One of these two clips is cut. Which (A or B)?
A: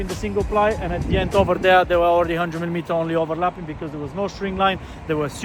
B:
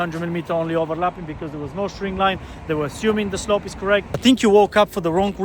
B